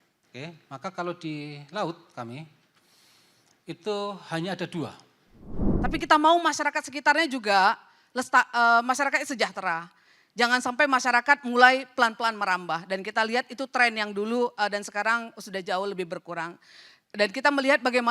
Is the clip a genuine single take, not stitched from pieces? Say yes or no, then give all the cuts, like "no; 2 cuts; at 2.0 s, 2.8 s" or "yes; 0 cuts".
no; 1 cut; at 5.7 s